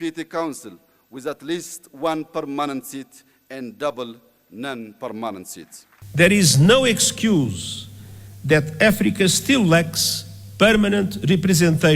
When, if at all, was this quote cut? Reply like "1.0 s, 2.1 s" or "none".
6.0 s